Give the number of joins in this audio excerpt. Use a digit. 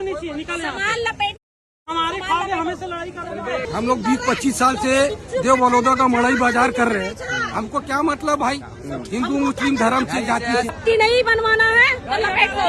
2